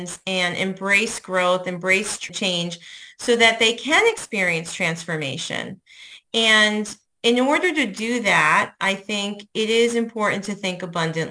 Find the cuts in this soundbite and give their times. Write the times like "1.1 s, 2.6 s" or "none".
2.2 s